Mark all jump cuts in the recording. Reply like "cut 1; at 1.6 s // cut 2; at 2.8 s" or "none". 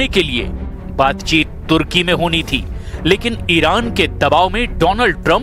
none